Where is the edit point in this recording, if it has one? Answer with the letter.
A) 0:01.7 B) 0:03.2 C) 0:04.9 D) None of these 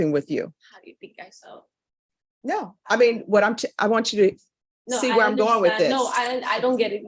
D